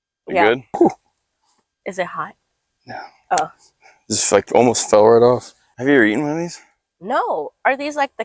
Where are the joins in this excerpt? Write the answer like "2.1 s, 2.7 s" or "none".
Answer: 0.8 s, 5.6 s